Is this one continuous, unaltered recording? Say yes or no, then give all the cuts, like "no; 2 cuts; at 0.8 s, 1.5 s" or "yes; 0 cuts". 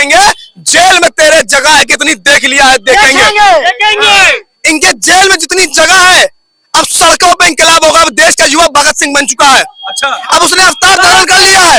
yes; 0 cuts